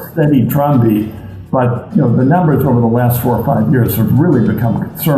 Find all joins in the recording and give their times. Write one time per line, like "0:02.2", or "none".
none